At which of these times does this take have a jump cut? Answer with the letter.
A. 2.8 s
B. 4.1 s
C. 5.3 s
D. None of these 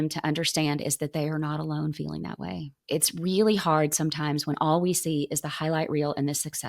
A